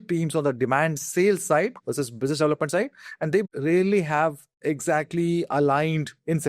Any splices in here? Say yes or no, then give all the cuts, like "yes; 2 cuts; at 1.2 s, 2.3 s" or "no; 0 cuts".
yes; 2 cuts; at 3.5 s, 4.5 s